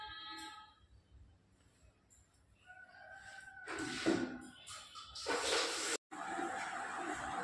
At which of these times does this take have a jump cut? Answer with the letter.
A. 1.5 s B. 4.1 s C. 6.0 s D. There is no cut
C